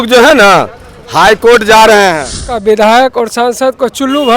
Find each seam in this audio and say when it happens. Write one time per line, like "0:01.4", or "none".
0:02.5